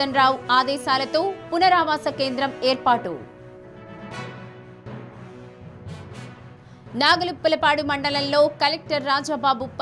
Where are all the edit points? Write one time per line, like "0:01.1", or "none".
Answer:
none